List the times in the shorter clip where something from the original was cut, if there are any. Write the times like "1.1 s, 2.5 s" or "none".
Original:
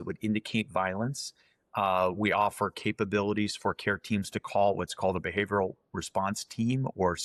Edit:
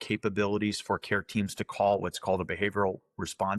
none